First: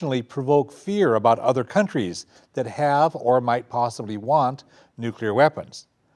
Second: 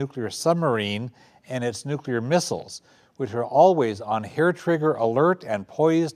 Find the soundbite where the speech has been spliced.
second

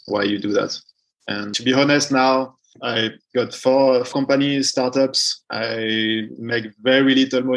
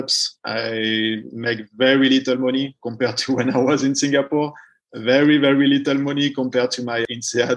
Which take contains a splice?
first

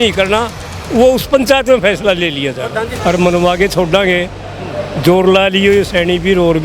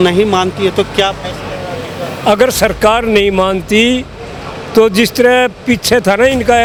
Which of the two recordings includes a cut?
first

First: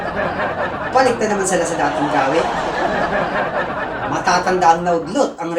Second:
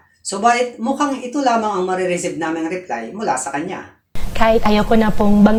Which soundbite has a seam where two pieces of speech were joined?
first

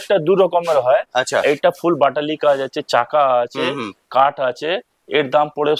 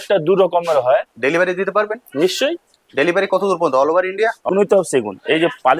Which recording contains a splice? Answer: second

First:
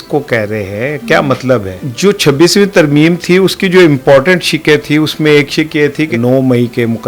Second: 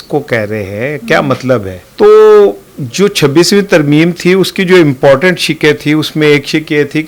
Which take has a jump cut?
first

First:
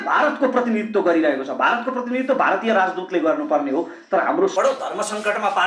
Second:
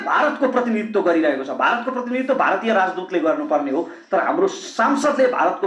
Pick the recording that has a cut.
first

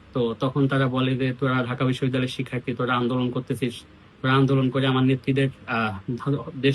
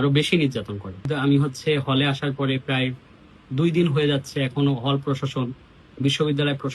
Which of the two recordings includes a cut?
second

